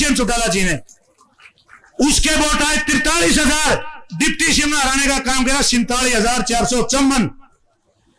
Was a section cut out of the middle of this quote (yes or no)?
no